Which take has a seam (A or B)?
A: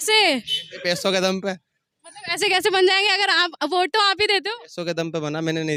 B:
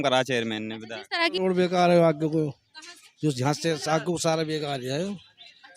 B